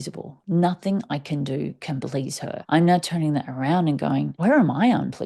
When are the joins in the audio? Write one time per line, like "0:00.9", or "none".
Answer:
0:02.6
0:04.3